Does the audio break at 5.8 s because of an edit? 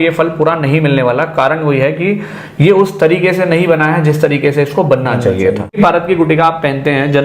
yes; 1 cut; at 5.8 s

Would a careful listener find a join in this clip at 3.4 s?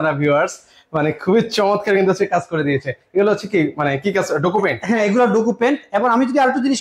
no; 0 cuts

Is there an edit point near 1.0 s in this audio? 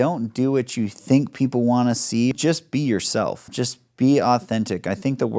yes; 3 cuts; at 1.0 s, 2.3 s, 3.5 s

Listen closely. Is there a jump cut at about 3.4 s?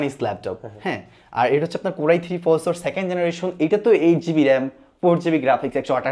no; 0 cuts

